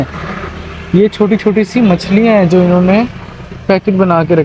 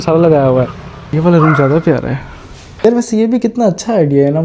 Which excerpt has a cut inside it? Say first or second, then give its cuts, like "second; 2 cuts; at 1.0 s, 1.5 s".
second; 2 cuts; at 1.1 s, 2.8 s